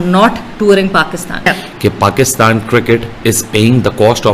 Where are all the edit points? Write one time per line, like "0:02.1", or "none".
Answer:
0:01.5